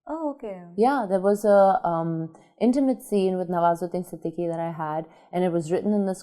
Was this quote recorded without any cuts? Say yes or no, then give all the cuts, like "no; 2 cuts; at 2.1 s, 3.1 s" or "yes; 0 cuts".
yes; 0 cuts